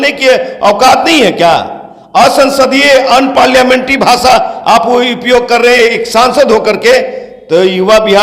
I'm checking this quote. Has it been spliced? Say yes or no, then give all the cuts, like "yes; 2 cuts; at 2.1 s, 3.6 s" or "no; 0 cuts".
no; 0 cuts